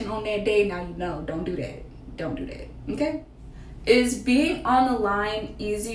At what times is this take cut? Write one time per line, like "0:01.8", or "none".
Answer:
0:03.4